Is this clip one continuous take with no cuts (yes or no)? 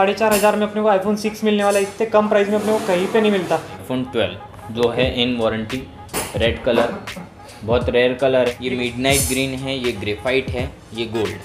no